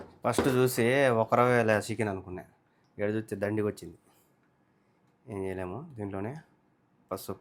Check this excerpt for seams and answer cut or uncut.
uncut